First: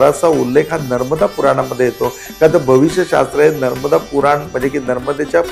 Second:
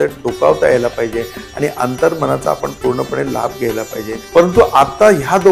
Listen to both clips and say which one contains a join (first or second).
second